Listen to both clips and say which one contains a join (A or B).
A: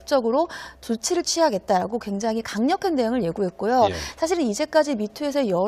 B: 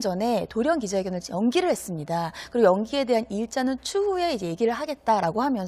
B